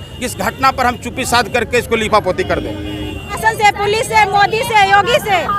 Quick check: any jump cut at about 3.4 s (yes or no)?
yes